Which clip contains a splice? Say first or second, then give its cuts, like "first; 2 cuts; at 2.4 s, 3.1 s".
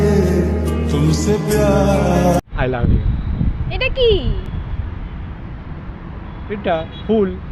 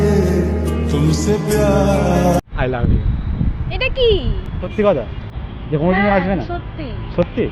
second; 1 cut; at 4.7 s